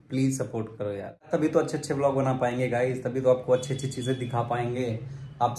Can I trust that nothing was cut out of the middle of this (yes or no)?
no